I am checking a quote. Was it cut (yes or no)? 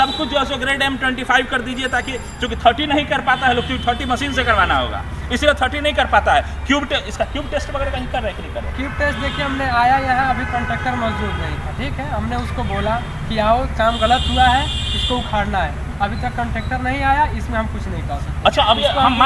no